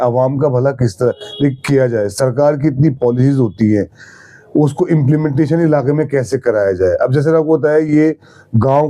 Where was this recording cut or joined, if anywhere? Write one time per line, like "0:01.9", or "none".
none